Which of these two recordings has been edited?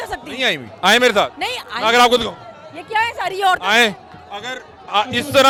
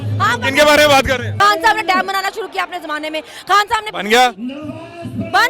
second; 1 cut; at 1.3 s

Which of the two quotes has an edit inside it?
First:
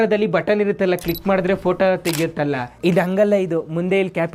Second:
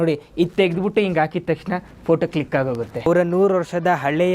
second; 1 cut; at 3.1 s

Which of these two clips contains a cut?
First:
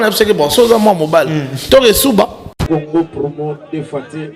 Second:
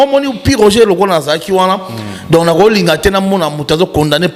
first; 1 cut; at 2.5 s

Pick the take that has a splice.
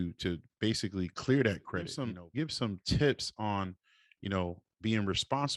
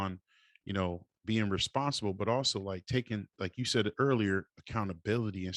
first; 1 cut; at 2.0 s

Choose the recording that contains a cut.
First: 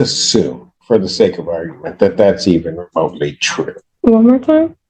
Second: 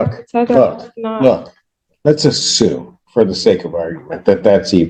first; 1 cut; at 3.9 s

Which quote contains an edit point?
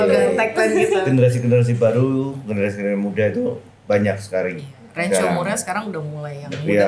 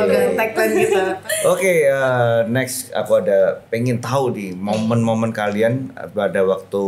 first; 1 cut; at 1.1 s

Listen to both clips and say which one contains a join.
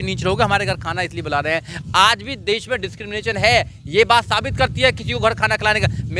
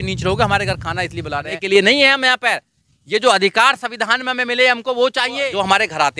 second; 2 cuts; at 1.5 s, 5.4 s

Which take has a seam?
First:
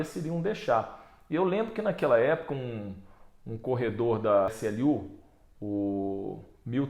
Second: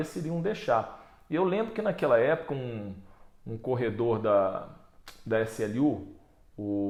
first; 1 cut; at 4.6 s

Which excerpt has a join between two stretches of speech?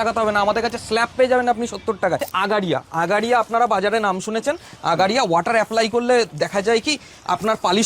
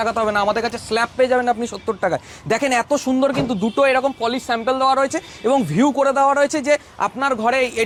first; 1 cut; at 2.3 s

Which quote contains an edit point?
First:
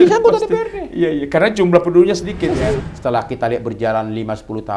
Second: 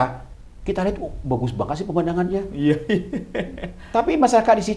first; 1 cut; at 2.8 s

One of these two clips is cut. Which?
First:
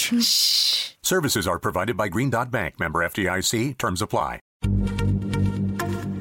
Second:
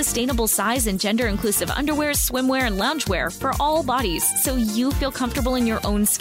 first; 1 cut; at 4.5 s

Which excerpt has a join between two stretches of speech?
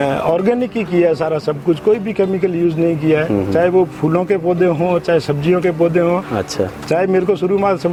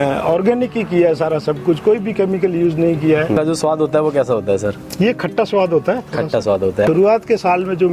second; 2 cuts; at 3.4 s, 6.9 s

